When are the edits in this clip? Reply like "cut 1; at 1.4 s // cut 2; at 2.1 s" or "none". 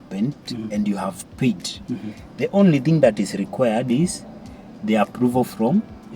none